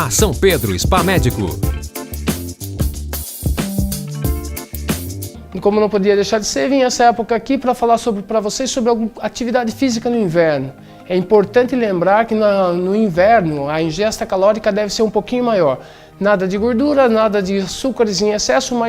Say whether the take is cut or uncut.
uncut